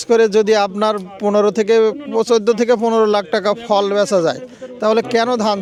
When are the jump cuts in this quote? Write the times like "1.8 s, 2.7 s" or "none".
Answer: none